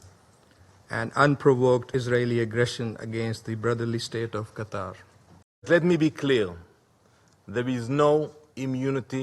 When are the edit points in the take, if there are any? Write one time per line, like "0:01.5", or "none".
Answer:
0:05.7